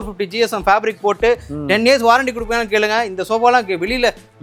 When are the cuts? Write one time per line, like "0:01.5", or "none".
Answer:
none